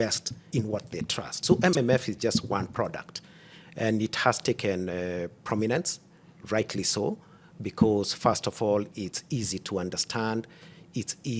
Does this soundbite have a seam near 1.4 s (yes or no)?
yes